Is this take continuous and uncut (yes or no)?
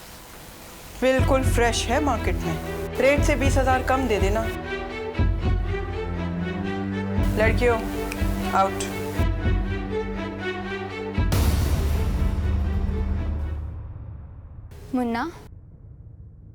no